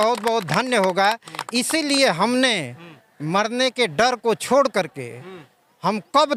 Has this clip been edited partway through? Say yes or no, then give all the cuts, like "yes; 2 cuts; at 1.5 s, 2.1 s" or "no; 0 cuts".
no; 0 cuts